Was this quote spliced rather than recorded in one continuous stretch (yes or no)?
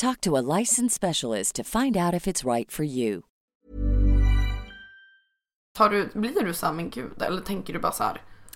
no